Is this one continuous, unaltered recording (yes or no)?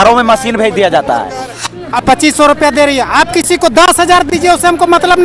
no